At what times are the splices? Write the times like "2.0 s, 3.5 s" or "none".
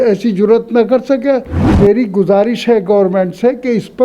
1.7 s